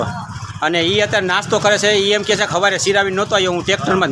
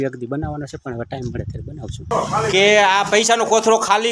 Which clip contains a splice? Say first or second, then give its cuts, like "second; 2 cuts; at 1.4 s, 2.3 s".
second; 1 cut; at 2.1 s